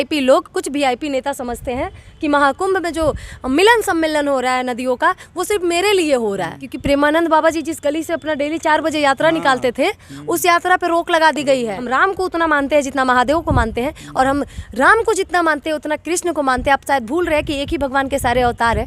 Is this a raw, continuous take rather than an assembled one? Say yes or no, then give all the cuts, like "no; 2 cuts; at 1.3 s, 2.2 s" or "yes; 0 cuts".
no; 2 cuts; at 6.6 s, 11.9 s